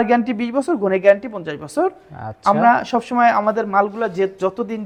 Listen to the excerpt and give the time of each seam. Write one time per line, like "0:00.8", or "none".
none